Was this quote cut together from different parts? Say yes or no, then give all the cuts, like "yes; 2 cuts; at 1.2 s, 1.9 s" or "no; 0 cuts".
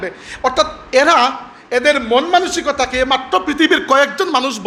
no; 0 cuts